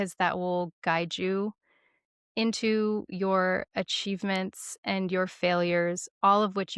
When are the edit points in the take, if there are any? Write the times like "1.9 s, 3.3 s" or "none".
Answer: none